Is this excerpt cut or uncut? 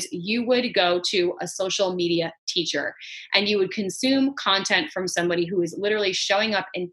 uncut